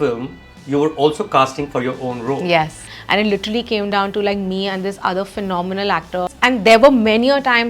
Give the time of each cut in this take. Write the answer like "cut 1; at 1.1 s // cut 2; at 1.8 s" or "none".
cut 1; at 2.8 s // cut 2; at 6.3 s